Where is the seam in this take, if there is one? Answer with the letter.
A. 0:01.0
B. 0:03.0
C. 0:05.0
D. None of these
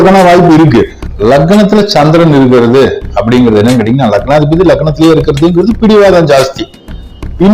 A